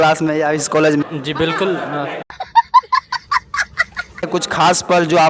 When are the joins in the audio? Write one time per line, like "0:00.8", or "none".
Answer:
0:01.0
0:02.2
0:04.3

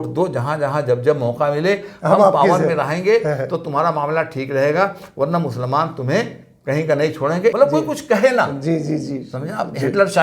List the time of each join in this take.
0:07.5

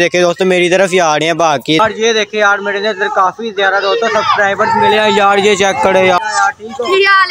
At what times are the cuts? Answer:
0:01.8
0:06.2

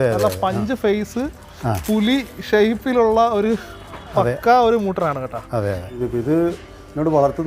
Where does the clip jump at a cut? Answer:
0:05.9

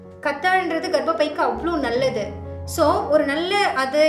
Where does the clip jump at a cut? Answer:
none

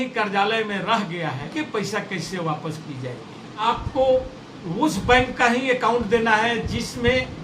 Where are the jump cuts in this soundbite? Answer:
0:01.5
0:03.7

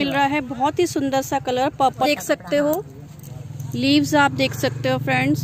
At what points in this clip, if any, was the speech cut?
0:01.9

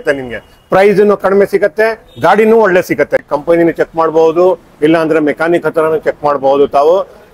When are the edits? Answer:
0:03.2

